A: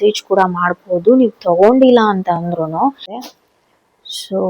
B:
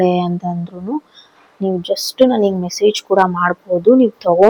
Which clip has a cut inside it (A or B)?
A